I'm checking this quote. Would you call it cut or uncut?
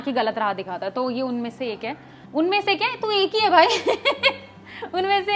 uncut